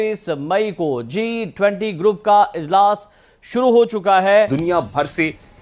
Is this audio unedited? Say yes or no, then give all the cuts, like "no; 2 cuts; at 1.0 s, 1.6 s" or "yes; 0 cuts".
no; 1 cut; at 4.5 s